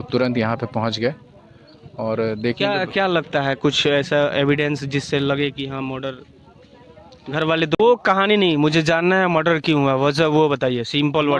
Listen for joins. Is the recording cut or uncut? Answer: cut